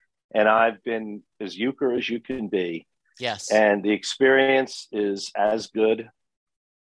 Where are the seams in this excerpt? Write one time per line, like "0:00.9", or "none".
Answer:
none